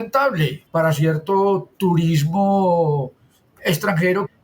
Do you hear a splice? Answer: no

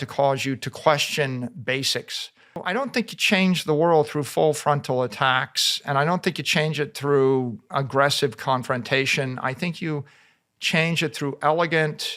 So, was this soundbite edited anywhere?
yes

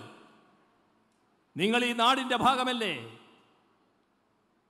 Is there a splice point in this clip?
no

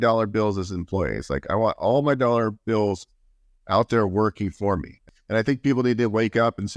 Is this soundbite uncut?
no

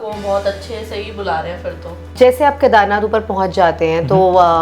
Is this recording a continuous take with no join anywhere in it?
no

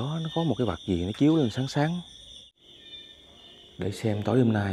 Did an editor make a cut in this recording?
yes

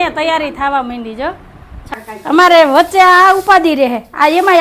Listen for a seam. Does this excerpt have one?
yes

